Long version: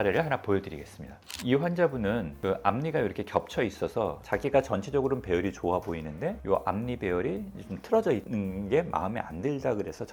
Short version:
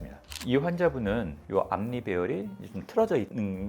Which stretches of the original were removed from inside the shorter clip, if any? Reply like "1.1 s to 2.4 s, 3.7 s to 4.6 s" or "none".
2.4 s to 6.4 s